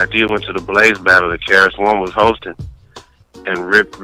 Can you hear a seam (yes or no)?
no